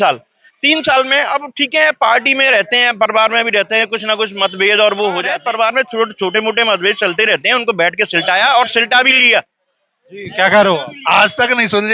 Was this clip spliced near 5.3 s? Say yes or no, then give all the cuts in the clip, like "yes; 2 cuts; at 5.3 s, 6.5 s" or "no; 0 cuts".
yes; 1 cut; at 5.3 s